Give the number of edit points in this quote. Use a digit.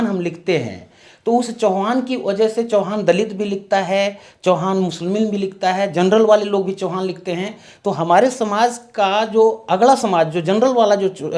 0